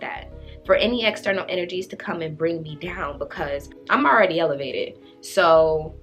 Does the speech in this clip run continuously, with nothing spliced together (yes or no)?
no